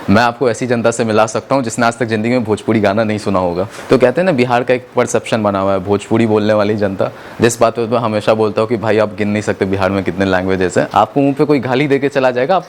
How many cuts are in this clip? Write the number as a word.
two